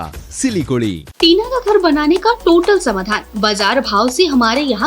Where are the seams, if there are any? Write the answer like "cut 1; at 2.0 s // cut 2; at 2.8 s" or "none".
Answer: cut 1; at 1.1 s